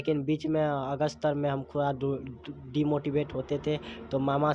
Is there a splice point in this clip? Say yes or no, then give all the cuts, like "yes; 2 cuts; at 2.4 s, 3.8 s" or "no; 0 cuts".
no; 0 cuts